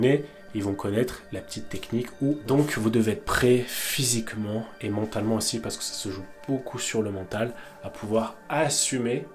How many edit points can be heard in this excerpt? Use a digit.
1